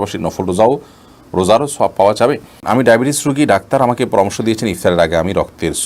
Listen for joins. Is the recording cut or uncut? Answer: cut